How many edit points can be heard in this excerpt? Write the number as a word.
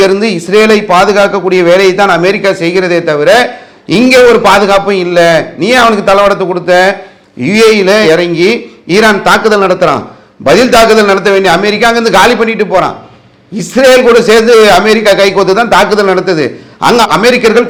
zero